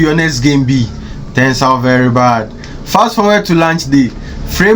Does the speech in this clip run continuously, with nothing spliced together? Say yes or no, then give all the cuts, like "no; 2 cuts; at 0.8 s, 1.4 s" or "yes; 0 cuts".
yes; 0 cuts